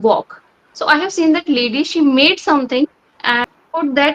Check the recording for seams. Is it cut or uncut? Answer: cut